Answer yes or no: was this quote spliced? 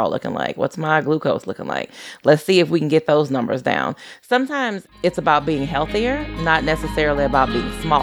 no